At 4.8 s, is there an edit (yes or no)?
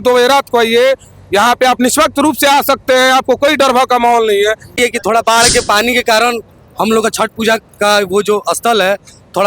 yes